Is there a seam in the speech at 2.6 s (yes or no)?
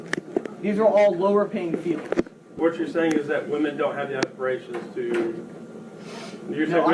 yes